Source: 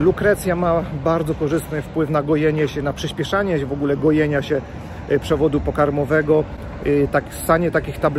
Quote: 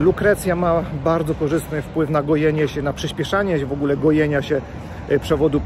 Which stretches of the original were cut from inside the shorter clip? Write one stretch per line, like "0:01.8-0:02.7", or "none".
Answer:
none